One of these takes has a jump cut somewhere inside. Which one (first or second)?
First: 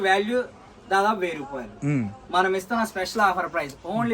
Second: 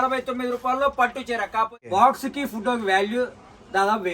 second